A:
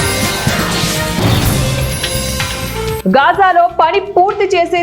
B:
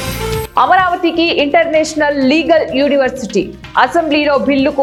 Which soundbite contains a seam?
A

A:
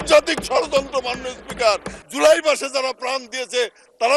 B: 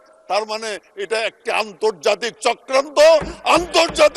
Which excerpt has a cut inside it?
A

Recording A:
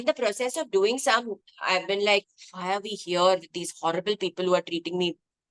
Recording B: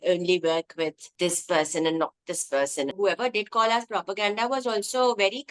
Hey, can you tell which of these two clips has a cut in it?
B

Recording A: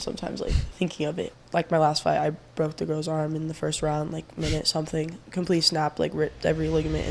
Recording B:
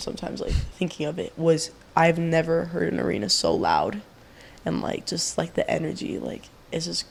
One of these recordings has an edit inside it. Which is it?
A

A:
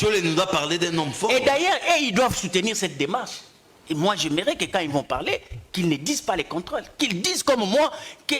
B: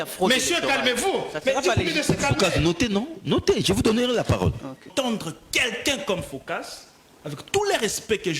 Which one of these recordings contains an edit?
B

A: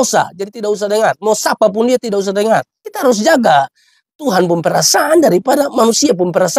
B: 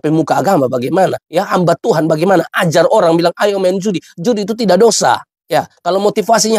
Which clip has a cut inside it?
B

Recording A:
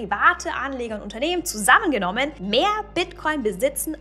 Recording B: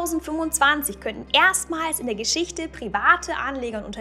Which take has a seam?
A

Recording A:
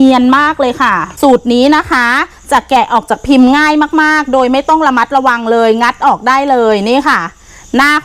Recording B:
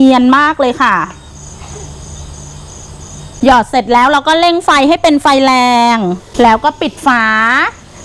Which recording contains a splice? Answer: A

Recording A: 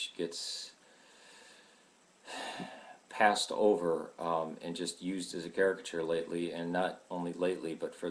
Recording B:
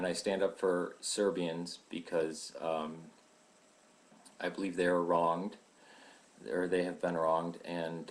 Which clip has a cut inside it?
A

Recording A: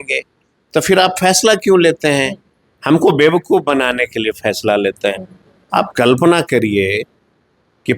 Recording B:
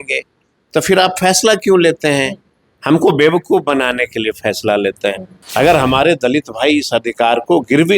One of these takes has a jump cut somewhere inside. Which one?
B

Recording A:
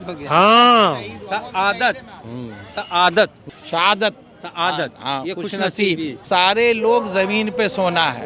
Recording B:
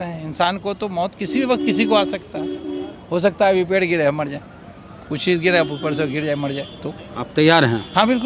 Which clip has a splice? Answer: A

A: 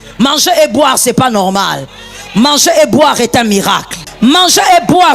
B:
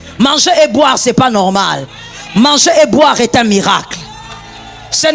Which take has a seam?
A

